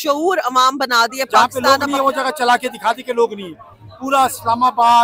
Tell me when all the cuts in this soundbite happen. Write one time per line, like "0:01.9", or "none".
0:01.5